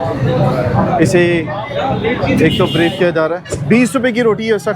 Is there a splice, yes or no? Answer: yes